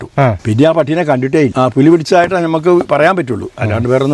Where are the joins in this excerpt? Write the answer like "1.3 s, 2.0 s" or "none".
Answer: 1.5 s